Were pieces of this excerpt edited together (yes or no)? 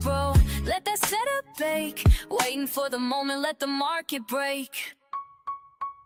no